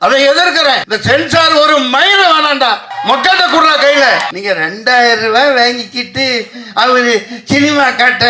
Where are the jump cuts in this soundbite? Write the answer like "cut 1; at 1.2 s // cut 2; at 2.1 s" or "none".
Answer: cut 1; at 0.9 s // cut 2; at 2.9 s // cut 3; at 4.3 s